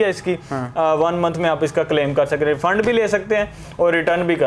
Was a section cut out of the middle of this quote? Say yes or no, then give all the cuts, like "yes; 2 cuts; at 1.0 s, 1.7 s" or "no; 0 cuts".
no; 0 cuts